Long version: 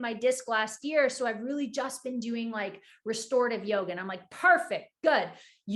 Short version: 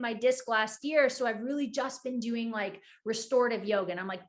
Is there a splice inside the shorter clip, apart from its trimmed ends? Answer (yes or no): no